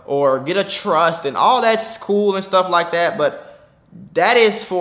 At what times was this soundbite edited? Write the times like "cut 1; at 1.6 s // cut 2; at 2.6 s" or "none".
none